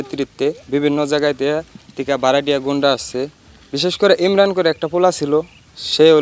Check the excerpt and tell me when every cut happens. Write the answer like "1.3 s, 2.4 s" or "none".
none